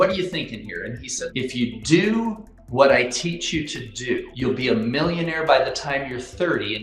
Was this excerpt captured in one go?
no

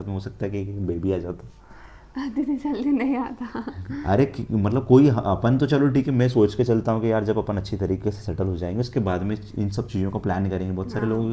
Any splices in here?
no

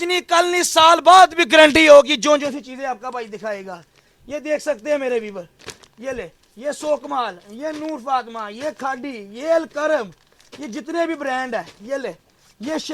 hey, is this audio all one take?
yes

